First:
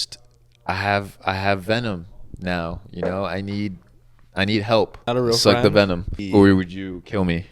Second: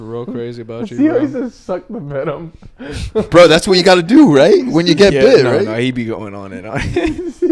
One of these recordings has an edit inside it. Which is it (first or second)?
first